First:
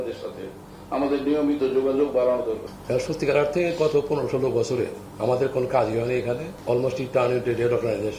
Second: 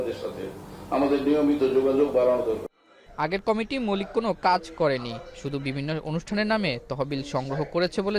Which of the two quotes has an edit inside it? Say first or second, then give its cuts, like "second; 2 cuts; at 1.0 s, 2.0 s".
first; 3 cuts; at 2.7 s, 5.0 s, 6.5 s